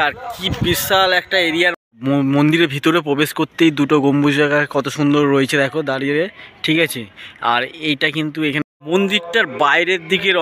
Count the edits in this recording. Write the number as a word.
two